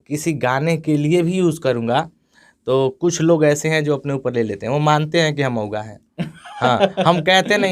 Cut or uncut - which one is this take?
uncut